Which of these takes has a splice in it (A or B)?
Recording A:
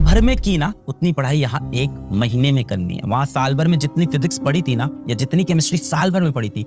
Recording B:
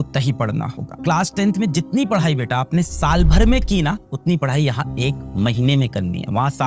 B